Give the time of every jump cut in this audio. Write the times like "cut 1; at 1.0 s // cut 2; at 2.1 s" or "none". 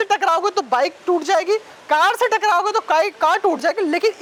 none